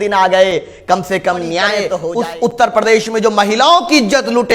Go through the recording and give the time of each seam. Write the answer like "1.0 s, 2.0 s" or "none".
1.9 s